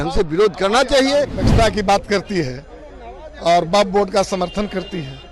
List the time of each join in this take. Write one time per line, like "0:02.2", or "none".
0:01.4

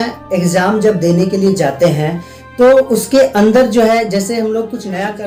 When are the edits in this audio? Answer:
none

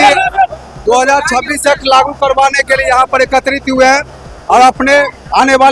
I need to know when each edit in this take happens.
none

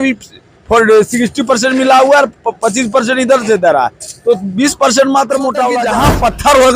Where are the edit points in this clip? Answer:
0:05.8

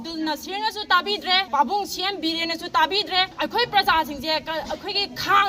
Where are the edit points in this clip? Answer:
0:01.5
0:03.3

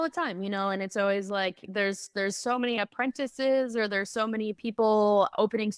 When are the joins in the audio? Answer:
none

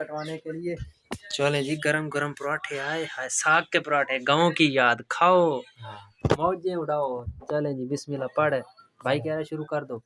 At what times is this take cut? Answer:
none

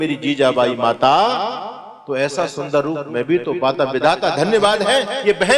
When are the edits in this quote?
none

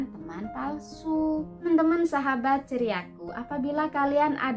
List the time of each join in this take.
0:01.7

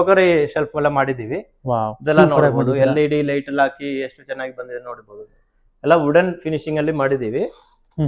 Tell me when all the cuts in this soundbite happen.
none

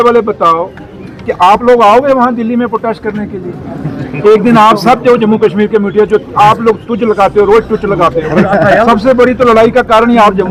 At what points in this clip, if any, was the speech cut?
none

